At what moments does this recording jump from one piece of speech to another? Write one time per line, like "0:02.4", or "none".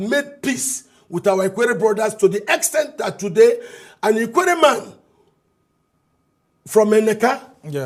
none